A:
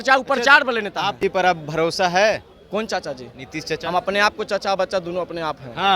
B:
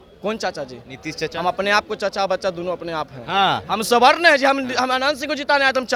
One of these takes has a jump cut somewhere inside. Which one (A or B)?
A